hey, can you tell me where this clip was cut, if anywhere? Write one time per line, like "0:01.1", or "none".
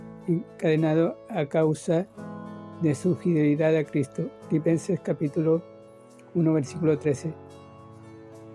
0:07.3